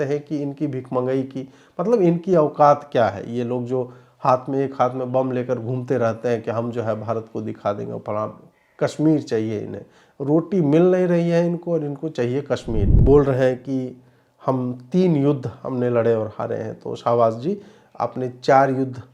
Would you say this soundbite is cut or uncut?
cut